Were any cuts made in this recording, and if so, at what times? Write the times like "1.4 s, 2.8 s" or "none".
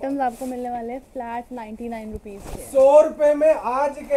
none